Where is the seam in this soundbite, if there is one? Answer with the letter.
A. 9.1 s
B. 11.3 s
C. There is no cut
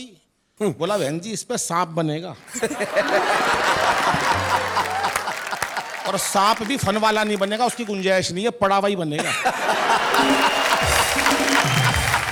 C